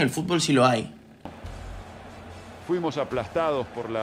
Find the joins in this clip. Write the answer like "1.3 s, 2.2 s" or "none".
1.4 s